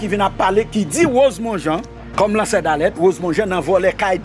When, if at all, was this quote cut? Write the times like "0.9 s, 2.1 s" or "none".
2.0 s